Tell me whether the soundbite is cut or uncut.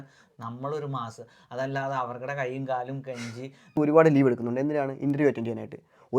cut